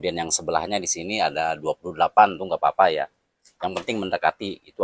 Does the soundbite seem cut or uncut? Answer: uncut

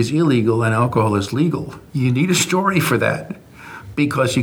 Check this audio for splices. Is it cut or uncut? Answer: cut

